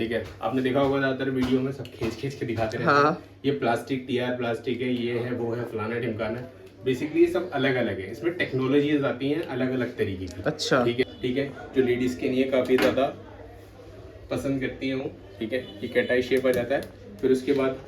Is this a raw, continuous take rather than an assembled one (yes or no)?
no